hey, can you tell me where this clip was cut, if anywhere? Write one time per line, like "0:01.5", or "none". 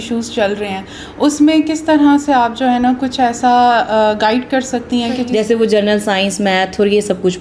0:05.2